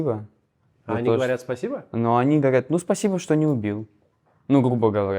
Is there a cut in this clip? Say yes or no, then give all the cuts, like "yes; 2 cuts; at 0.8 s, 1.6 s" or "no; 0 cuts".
no; 0 cuts